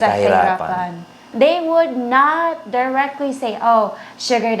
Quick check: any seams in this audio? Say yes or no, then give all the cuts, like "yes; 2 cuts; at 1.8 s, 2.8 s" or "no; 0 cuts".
yes; 1 cut; at 1.2 s